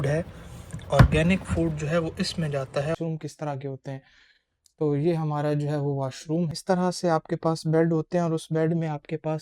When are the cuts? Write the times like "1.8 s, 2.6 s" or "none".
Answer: 3.0 s, 6.6 s